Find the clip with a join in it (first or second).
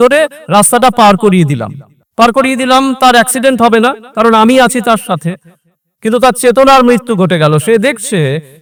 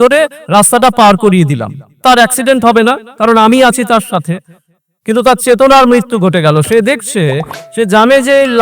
second